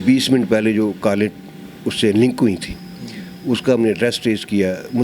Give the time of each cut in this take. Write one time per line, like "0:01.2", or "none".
none